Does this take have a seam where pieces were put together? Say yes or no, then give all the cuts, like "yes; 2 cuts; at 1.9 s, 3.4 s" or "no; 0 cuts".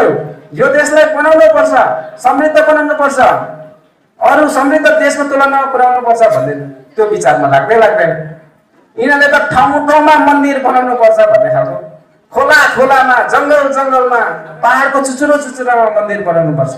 no; 0 cuts